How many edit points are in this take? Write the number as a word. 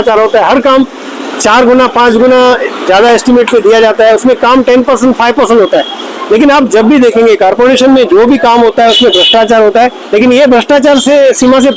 one